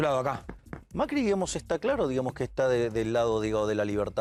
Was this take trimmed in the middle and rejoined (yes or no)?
no